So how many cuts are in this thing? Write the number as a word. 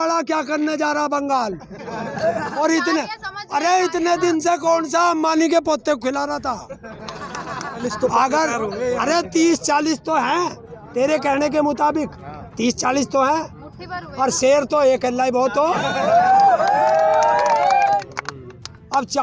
two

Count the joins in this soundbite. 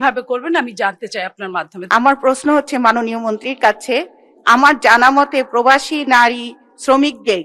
one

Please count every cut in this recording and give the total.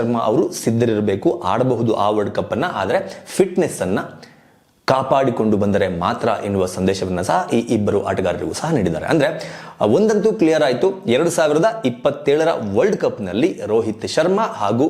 zero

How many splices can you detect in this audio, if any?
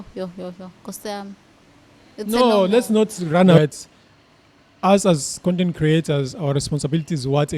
one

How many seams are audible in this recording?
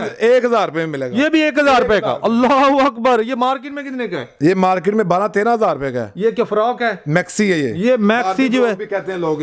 zero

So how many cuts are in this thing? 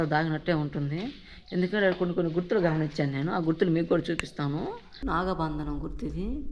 one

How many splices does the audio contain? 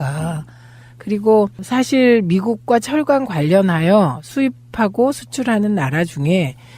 one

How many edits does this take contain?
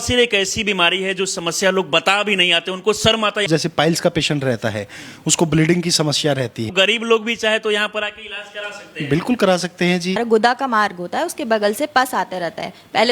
three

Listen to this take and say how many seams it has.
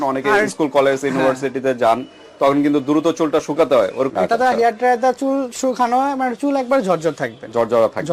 one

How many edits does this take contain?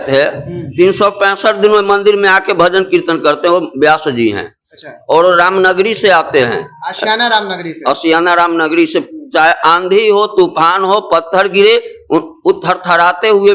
zero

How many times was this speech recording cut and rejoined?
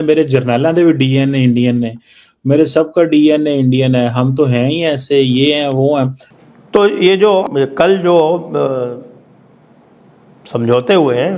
two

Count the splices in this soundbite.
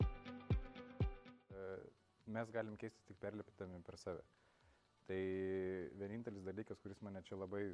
one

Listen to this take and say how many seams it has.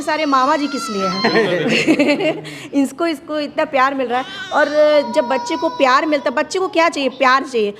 zero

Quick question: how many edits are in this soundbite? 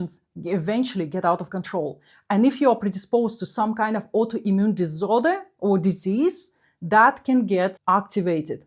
one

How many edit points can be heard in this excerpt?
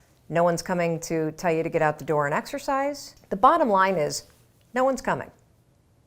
one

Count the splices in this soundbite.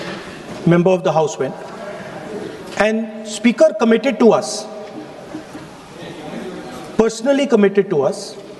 zero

